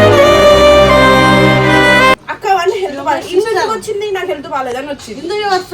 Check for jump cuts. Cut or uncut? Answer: cut